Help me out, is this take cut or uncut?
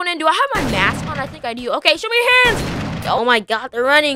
cut